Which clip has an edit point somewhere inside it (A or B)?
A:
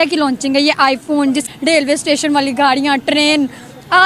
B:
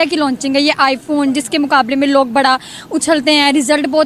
A